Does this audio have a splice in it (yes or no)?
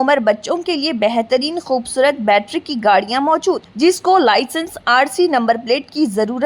no